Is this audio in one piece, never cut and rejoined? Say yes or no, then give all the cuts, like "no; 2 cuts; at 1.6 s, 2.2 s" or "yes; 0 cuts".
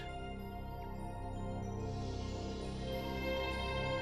no; 1 cut; at 1.7 s